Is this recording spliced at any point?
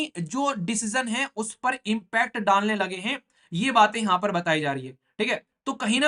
no; 0 cuts

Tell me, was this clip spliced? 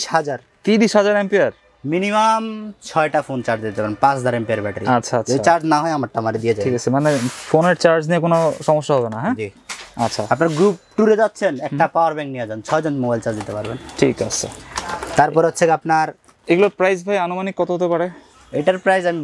no; 0 cuts

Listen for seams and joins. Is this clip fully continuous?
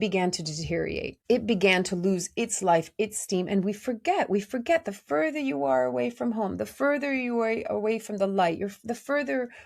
no; 1 cut; at 1.1 s

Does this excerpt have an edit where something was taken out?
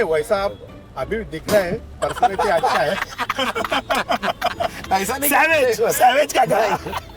no; 0 cuts

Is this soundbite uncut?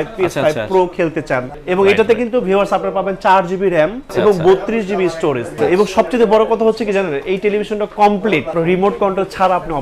no; 4 cuts; at 1.6 s, 4.0 s, 5.6 s, 8.5 s

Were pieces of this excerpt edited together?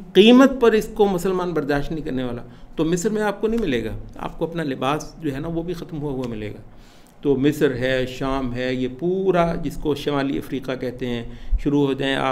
no; 0 cuts

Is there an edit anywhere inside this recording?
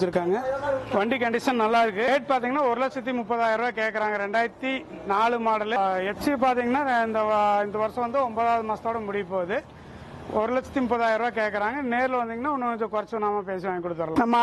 no; 0 cuts

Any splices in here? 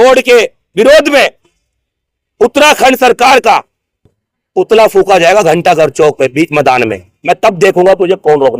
no; 0 cuts

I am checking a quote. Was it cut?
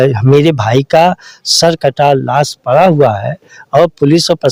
no; 0 cuts

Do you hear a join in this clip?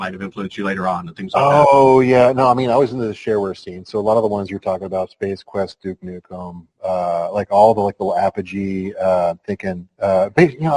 no; 0 cuts

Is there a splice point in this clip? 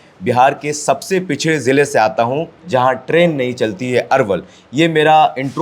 no; 0 cuts

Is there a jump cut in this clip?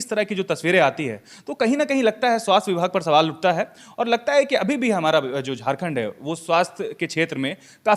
no; 0 cuts

